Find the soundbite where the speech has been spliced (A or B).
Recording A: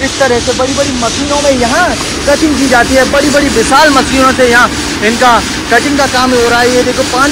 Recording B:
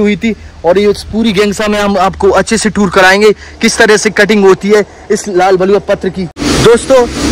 B